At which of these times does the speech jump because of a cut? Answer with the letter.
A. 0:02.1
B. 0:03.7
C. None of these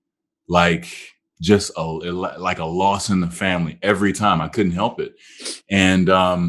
C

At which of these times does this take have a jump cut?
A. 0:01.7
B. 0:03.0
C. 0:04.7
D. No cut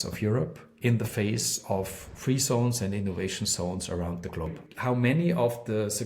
C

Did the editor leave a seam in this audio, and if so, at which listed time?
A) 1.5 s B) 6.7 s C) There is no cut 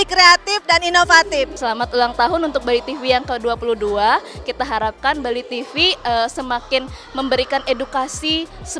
A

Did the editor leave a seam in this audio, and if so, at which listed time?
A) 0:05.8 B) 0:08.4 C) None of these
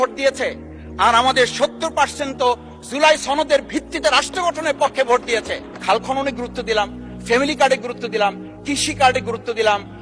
A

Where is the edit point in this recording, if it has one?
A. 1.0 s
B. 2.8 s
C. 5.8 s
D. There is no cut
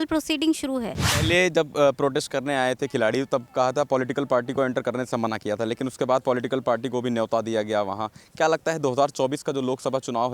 A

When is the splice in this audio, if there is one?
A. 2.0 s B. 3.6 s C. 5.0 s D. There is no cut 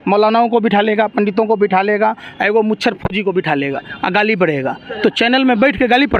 D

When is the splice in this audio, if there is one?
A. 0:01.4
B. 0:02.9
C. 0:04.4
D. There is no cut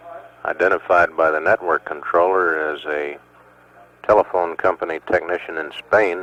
D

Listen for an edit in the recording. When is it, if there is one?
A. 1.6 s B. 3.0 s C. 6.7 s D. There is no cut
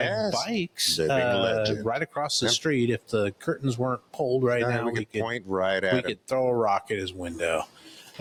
D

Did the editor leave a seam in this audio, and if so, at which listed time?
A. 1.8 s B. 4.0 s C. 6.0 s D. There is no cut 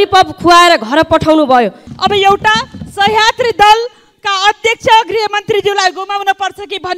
A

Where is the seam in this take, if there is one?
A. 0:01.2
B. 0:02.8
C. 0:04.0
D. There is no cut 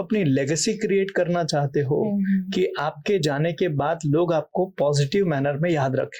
D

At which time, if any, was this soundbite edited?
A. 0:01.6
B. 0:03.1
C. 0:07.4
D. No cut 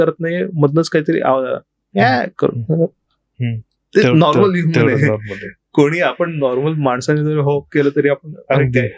D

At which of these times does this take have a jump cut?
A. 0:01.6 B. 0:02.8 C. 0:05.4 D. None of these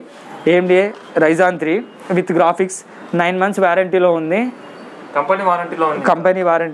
D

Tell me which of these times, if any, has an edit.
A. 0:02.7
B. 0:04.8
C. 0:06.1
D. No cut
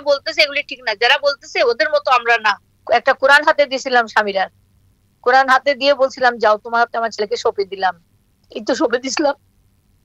A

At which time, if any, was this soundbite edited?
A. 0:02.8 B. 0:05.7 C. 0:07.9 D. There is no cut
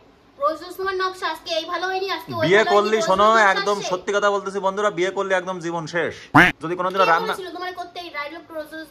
D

